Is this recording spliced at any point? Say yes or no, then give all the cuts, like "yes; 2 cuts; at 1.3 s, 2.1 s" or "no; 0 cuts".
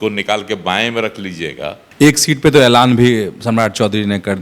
yes; 1 cut; at 1.8 s